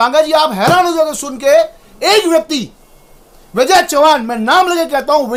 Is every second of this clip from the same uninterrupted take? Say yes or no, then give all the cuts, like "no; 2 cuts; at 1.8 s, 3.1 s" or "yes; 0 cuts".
yes; 0 cuts